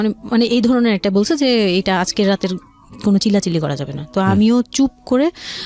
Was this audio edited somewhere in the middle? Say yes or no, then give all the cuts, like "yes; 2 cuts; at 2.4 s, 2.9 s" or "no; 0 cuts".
no; 0 cuts